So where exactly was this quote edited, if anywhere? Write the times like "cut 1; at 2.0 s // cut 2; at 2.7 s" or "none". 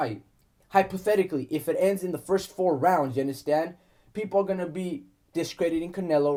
none

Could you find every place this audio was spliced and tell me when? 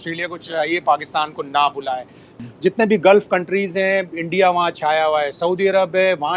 cut 1; at 2.3 s

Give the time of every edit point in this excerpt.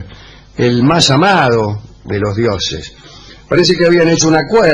cut 1; at 3.4 s

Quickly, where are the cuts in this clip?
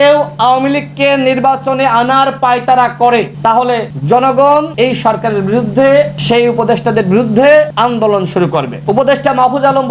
cut 1; at 3.4 s // cut 2; at 4.7 s // cut 3; at 6.2 s // cut 4; at 7.7 s // cut 5; at 8.7 s

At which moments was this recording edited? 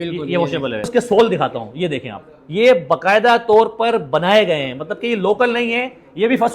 cut 1; at 0.9 s

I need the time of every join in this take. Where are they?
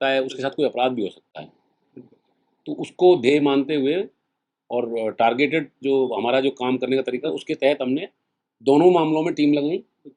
none

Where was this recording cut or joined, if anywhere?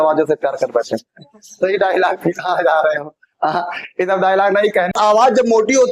cut 1; at 4.9 s

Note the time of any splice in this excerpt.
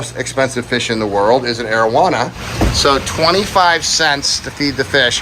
cut 1; at 2.4 s

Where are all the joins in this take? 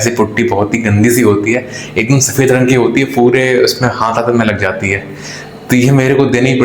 none

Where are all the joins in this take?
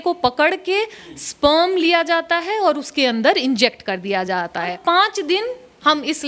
cut 1; at 4.8 s

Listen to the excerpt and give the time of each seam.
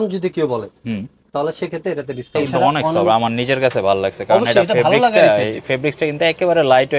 cut 1; at 2.3 s

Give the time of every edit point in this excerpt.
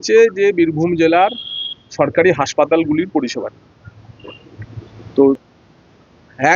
cut 1; at 5.4 s

